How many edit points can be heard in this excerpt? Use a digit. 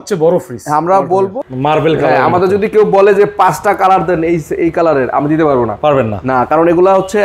1